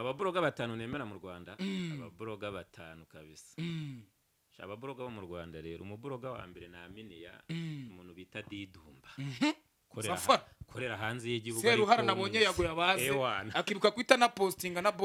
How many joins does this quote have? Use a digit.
0